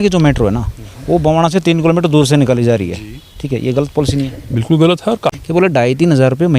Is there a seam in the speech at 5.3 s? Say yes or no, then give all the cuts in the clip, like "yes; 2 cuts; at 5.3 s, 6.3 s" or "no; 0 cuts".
yes; 1 cut; at 5.3 s